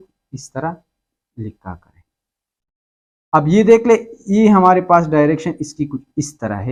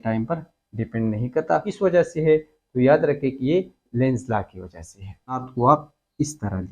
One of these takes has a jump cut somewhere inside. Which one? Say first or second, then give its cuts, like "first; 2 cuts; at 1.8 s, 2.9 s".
second; 2 cuts; at 1.7 s, 5.5 s